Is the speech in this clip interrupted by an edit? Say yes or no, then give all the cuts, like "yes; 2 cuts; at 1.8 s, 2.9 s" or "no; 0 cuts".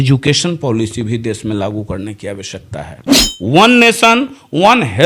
no; 0 cuts